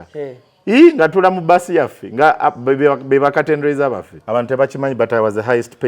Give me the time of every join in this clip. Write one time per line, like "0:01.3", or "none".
0:04.1